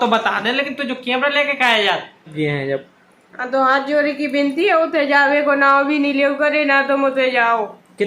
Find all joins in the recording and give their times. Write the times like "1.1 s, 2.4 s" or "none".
2.3 s

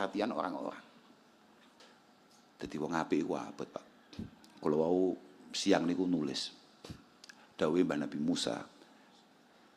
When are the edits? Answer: 1.8 s

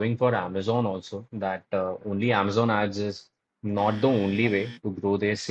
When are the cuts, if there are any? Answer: none

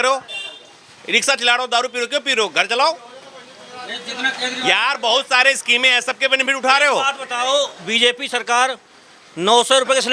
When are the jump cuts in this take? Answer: none

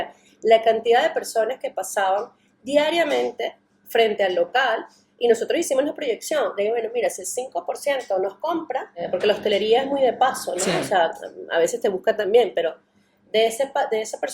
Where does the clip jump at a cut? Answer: 9.0 s

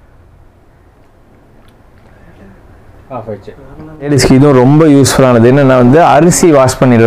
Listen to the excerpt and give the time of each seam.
4.1 s

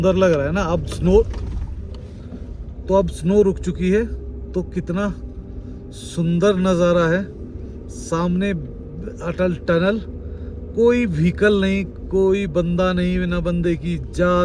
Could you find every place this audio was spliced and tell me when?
none

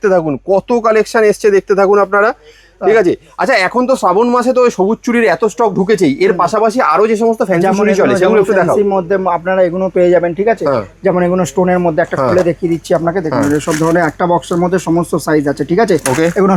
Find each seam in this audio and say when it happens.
none

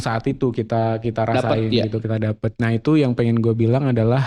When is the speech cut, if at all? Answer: 2.5 s

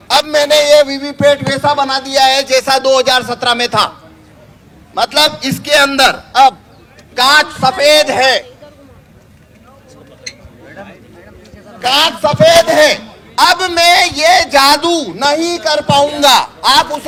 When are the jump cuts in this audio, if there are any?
none

